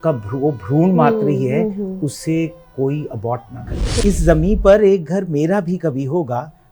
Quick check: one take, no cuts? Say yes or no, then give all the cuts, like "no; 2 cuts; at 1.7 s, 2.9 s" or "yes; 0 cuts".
no; 1 cut; at 4.0 s